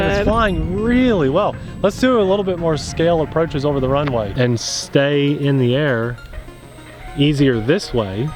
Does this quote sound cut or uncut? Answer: cut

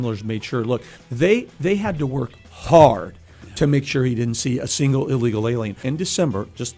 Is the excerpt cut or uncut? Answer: cut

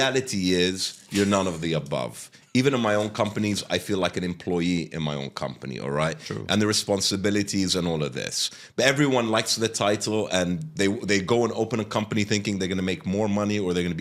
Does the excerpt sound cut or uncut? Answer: uncut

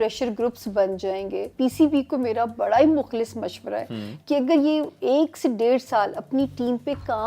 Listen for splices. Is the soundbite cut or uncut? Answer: cut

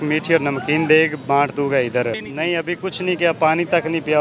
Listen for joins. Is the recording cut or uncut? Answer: cut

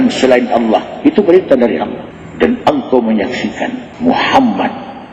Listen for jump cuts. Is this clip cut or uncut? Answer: cut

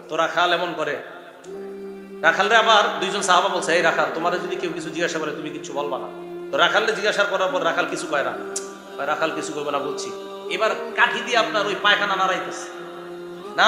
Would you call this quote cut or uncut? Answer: uncut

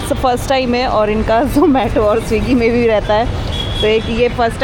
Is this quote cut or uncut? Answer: uncut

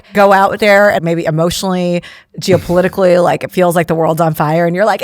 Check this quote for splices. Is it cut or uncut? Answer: cut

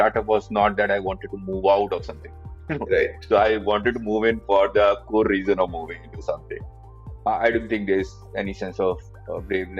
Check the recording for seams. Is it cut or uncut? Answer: cut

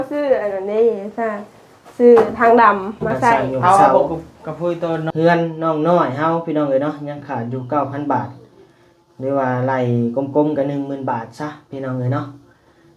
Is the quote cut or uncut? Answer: cut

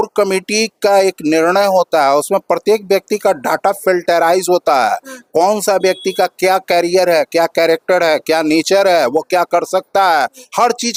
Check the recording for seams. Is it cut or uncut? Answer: uncut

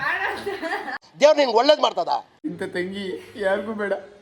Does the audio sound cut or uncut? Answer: cut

